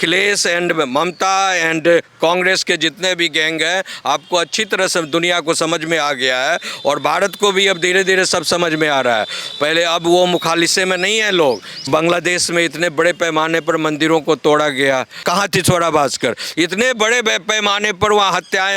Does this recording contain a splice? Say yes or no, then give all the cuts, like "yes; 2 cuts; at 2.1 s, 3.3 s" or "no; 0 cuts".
yes; 2 cuts; at 11.8 s, 15.2 s